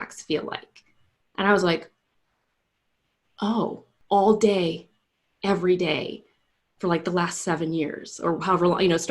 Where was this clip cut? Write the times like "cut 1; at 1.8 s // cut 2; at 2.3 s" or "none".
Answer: cut 1; at 3.9 s